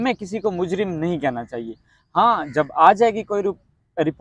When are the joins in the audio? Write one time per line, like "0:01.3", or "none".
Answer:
none